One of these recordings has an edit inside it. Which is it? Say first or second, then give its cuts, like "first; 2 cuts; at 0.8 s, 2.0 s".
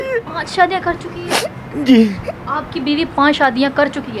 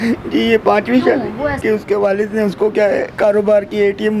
second; 2 cuts; at 1.6 s, 3.1 s